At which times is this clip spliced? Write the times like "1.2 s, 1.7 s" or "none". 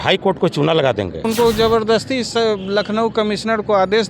1.3 s